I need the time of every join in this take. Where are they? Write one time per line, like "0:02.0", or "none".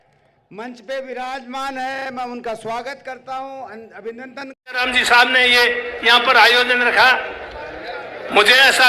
0:04.8